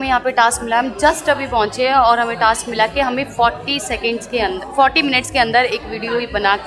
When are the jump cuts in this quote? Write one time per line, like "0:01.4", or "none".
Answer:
none

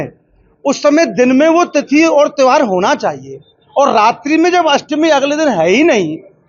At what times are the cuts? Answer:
none

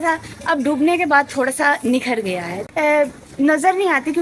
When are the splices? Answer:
0:02.5

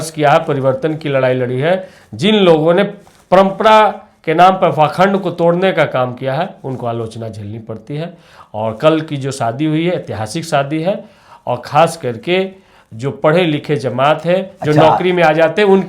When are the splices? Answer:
none

